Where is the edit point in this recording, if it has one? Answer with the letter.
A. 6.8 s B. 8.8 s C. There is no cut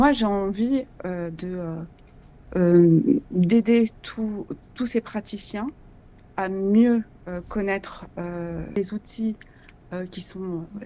B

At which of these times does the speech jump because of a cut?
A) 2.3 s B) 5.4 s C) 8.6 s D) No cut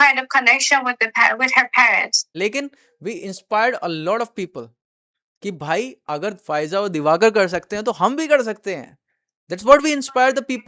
A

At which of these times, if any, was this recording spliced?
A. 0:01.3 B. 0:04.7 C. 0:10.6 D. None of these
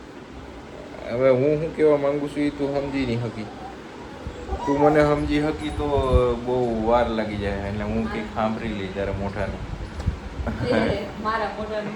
D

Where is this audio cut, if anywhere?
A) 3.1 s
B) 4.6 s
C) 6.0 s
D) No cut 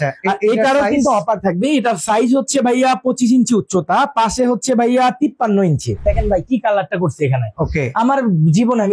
C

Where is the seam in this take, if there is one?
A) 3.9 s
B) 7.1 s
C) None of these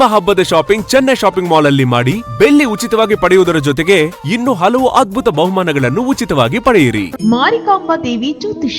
B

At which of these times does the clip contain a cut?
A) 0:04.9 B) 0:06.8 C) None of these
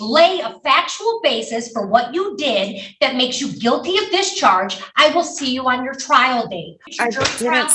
B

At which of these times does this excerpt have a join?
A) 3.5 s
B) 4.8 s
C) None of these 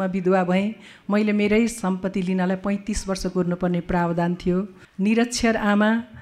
B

